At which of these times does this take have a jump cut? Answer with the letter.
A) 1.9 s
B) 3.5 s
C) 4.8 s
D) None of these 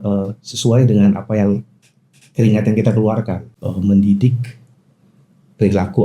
B